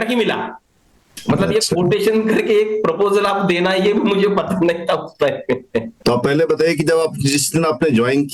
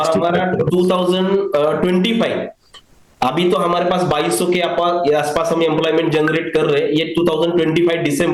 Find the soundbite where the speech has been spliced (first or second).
first